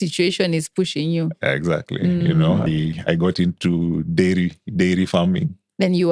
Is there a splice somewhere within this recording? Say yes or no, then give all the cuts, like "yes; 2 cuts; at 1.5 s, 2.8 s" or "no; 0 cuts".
yes; 1 cut; at 2.7 s